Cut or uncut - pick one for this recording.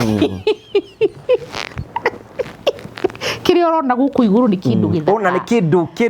uncut